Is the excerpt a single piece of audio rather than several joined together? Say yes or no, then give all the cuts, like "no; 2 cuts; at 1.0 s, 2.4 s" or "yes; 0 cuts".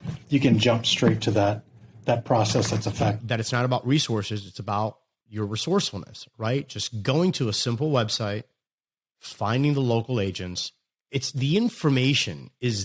no; 1 cut; at 3.2 s